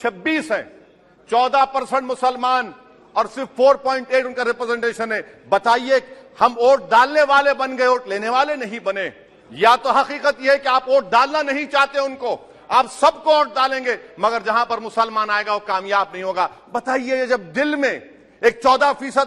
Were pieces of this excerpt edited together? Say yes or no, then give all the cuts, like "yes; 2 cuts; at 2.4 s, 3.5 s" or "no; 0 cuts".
no; 0 cuts